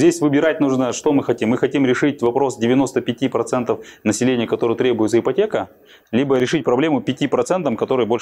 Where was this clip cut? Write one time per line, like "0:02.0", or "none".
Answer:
0:06.4